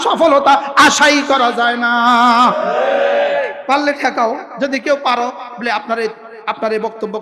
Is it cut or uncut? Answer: cut